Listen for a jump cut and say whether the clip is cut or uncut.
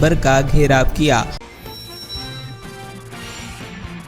cut